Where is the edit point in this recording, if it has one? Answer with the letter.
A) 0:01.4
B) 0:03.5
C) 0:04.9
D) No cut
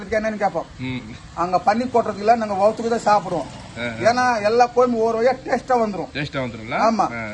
D